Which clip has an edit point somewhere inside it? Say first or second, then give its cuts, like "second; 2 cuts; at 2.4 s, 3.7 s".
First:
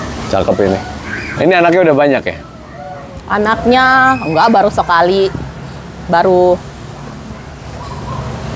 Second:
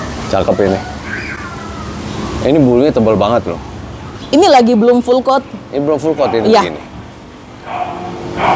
first; 1 cut; at 1.3 s